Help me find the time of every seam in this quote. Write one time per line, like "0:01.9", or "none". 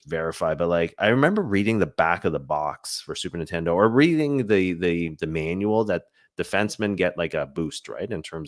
none